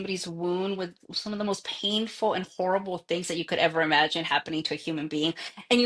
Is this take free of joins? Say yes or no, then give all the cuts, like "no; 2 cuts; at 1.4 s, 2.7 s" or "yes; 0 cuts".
yes; 0 cuts